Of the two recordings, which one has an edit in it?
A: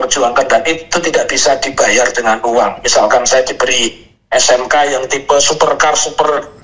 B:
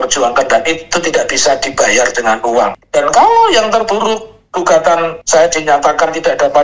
B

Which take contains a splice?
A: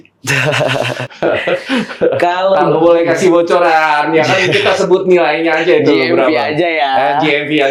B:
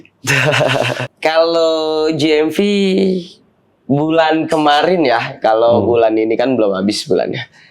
B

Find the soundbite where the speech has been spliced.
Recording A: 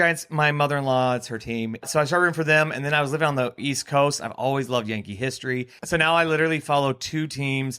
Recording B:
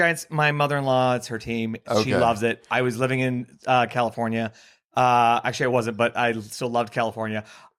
A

